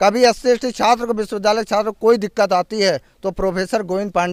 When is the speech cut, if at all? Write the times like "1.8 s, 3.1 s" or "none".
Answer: none